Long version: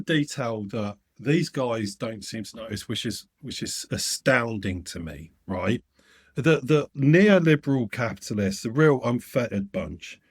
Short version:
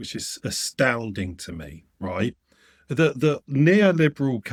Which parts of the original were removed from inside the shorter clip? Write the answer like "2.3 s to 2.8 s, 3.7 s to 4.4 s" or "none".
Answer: none